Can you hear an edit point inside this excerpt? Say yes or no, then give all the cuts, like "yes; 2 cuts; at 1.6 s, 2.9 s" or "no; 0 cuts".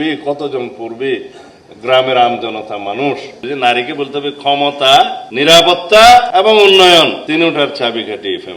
yes; 4 cuts; at 3.3 s, 5.2 s, 6.3 s, 7.2 s